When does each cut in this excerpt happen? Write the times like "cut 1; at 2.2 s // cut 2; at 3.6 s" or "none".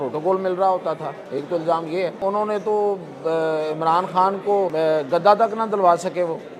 cut 1; at 1.2 s // cut 2; at 2.2 s // cut 3; at 4.7 s